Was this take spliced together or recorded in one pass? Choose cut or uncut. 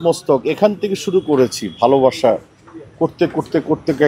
uncut